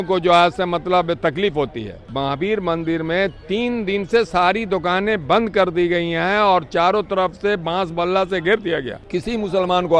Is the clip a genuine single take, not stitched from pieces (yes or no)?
no